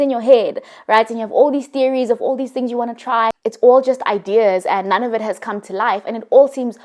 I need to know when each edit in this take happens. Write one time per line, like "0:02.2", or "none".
0:03.4